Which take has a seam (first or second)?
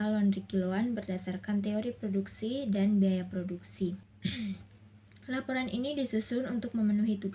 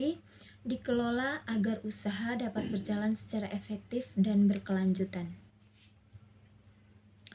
first